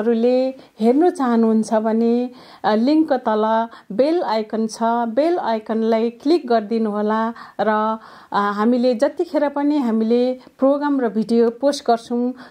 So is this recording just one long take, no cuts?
yes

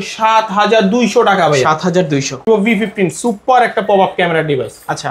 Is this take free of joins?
no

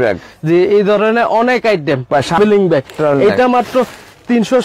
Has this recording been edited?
yes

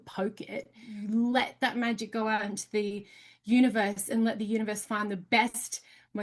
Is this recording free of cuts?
no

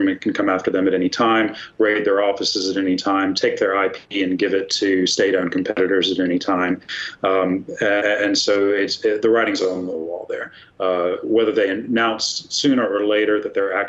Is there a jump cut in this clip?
no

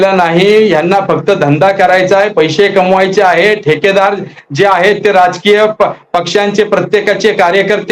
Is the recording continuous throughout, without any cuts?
yes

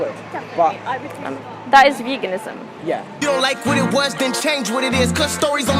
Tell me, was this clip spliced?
yes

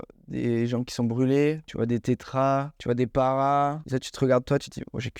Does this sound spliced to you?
yes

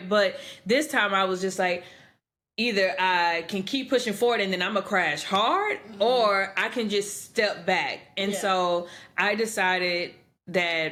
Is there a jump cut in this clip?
no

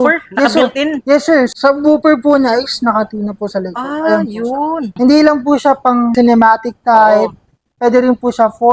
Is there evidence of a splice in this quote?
yes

